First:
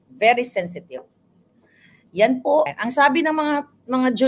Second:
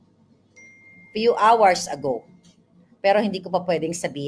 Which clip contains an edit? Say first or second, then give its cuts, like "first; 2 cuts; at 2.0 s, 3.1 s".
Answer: first; 1 cut; at 2.7 s